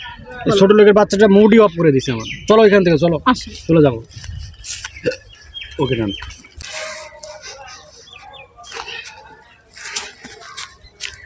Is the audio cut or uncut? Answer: uncut